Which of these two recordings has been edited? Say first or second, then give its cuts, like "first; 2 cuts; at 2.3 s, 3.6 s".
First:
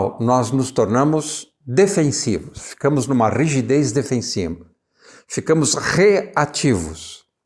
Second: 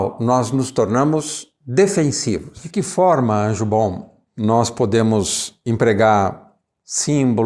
second; 1 cut; at 2.6 s